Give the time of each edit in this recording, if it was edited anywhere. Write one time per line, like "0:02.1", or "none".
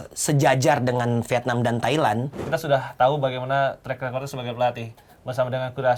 0:02.4

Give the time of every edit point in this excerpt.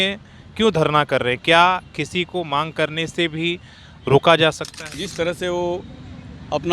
0:05.0

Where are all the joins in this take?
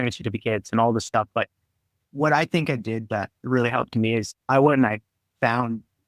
0:01.9

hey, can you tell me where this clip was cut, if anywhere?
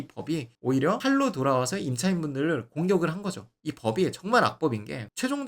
0:03.6

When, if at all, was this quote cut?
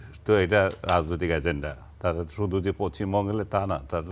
none

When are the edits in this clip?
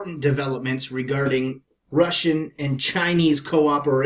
none

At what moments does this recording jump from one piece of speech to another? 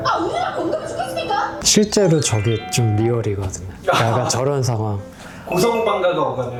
none

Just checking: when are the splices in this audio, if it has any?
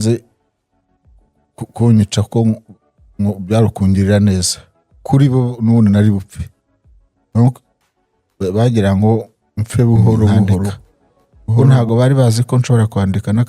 0:11.6

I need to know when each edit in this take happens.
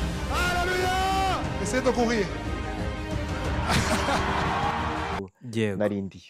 0:05.2

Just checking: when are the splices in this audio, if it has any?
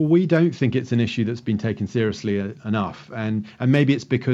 none

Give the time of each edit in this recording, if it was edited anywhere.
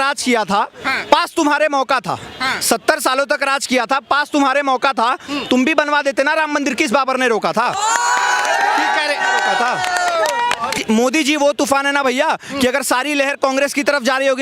0:10.8

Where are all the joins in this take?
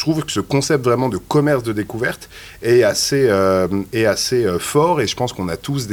none

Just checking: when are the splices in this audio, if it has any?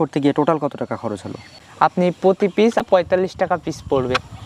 0:01.5
0:02.8

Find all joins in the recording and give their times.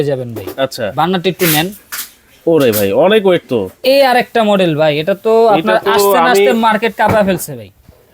0:03.7

